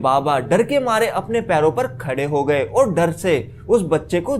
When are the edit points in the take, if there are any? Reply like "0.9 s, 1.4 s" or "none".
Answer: none